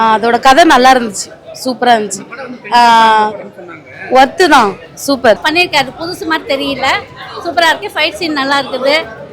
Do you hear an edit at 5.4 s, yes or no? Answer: yes